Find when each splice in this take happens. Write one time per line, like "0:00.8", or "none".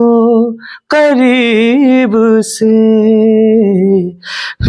none